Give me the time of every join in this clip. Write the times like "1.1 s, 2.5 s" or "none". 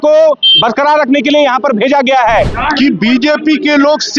2.6 s